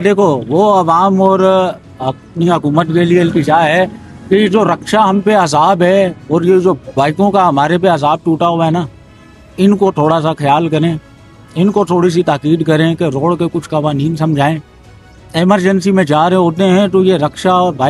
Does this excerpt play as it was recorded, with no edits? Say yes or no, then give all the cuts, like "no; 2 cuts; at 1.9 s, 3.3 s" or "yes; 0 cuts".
yes; 0 cuts